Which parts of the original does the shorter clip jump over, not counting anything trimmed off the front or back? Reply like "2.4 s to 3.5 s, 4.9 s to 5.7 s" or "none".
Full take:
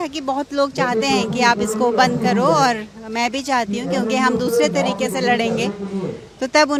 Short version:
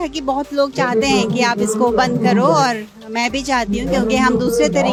none